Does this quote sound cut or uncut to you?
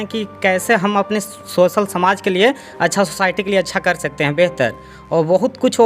uncut